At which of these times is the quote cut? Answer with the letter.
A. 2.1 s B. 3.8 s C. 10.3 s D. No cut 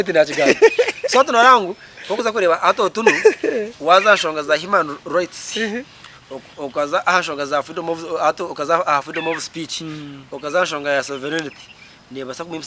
D